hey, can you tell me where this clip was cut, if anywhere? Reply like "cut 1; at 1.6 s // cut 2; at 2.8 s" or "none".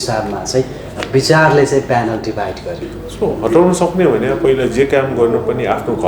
cut 1; at 2.9 s